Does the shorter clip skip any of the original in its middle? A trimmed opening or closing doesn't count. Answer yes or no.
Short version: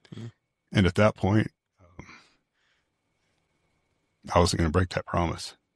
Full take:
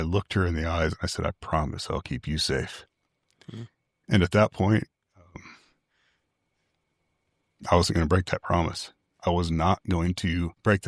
no